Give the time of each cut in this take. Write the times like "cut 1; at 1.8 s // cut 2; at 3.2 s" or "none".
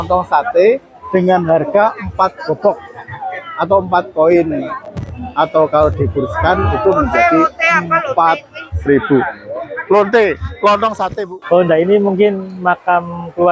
cut 1; at 11.3 s